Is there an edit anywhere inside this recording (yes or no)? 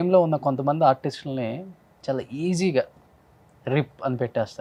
no